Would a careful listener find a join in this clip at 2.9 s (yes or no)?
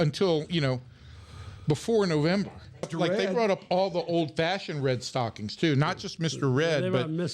yes